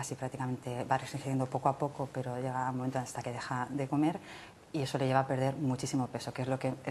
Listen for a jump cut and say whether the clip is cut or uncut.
uncut